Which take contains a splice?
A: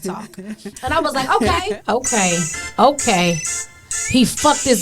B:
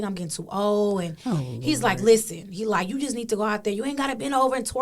A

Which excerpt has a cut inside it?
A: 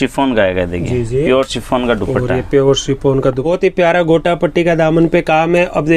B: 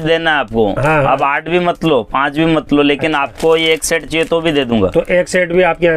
A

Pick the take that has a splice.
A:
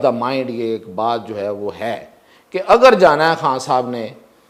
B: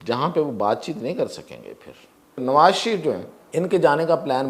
B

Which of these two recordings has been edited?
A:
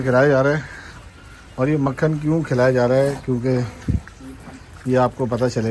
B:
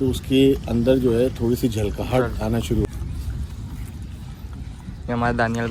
B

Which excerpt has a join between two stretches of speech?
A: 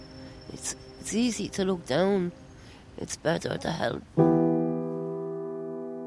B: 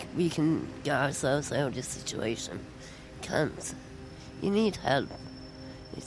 A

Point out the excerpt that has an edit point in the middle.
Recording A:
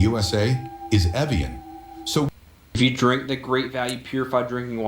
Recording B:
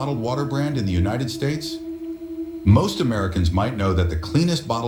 A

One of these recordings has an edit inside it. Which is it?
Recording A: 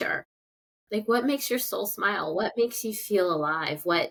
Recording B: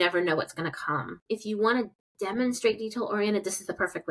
B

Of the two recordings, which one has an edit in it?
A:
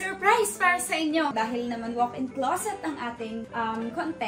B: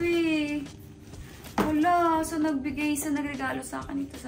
A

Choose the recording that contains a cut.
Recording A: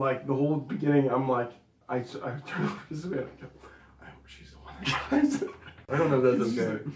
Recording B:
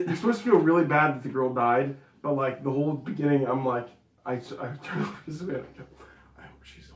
A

